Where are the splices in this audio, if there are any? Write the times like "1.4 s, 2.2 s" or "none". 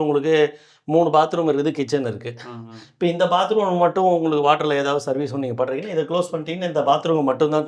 none